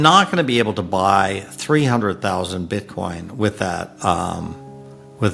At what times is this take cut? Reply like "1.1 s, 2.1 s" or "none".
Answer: none

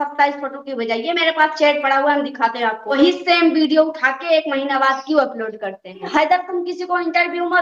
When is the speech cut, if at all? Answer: 2.9 s, 6.0 s

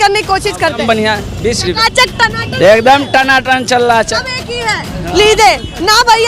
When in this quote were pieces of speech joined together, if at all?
0.8 s, 4.2 s

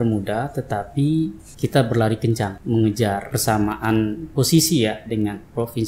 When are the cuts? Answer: 1.4 s, 2.6 s, 3.3 s

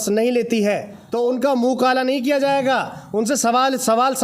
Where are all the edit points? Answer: 1.0 s

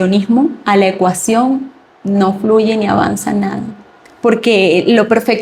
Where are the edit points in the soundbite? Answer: none

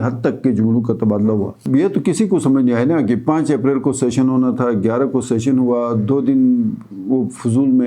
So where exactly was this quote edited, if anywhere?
1.6 s

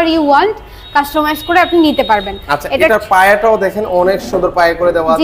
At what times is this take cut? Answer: none

